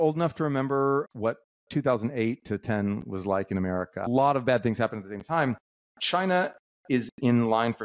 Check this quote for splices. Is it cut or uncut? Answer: cut